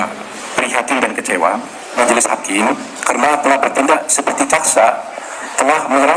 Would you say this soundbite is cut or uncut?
cut